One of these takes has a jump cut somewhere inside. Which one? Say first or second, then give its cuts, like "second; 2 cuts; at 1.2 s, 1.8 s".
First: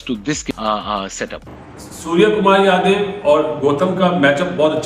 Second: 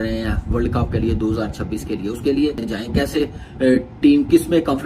first; 1 cut; at 1.6 s